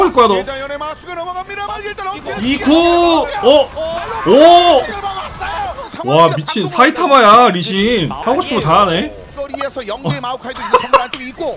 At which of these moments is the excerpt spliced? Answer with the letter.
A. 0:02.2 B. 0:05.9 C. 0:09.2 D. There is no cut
B